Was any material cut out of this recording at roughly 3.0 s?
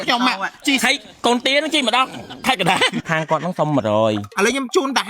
yes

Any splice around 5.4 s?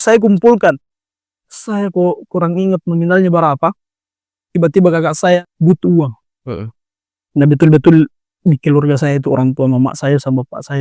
yes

